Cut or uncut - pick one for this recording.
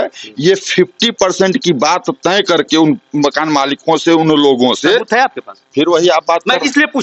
uncut